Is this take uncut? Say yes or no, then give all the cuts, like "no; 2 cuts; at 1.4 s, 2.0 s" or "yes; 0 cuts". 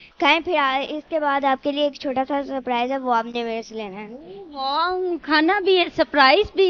yes; 0 cuts